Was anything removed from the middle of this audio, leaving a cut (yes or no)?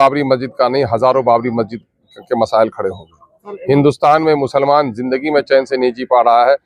no